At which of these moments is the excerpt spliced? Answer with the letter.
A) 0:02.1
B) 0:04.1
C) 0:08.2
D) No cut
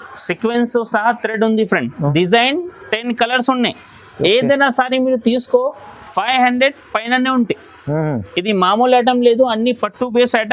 A